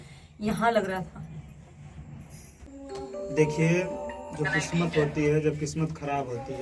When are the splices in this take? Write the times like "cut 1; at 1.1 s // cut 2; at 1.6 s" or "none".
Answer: cut 1; at 2.7 s